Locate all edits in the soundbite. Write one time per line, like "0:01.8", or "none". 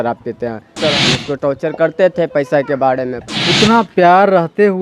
0:00.8
0:03.2